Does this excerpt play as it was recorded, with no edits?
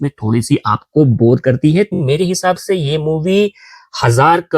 no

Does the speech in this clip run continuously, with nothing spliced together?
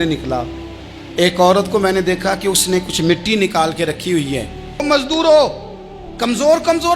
no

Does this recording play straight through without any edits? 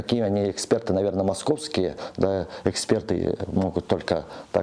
yes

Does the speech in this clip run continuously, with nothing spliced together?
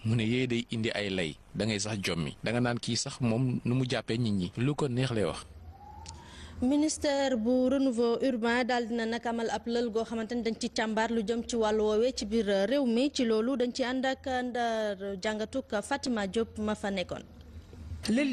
no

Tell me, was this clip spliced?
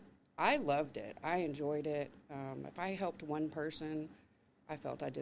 no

